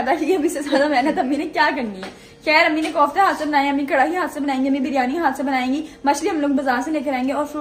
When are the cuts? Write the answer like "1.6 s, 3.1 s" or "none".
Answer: none